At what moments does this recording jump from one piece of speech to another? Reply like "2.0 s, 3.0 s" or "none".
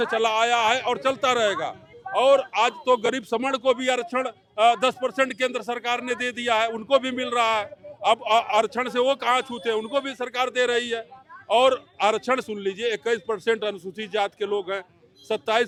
none